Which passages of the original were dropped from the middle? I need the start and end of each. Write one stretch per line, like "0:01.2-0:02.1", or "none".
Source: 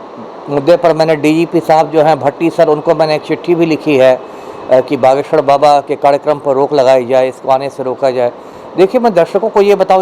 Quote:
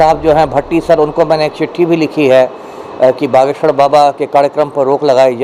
none